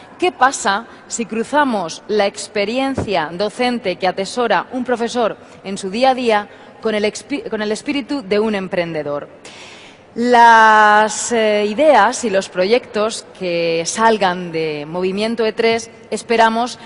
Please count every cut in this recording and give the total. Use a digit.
0